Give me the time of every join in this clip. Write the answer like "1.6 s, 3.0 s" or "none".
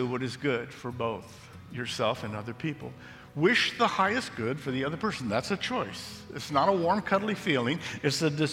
none